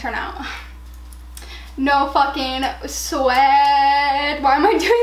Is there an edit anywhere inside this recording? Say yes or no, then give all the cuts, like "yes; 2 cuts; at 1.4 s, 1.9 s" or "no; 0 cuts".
no; 0 cuts